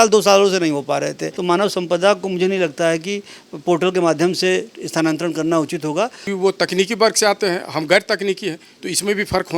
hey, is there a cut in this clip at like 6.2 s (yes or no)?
yes